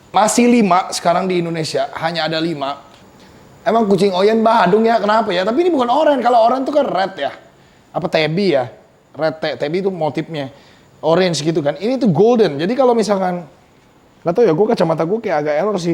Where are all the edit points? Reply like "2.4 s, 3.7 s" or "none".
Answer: 2.9 s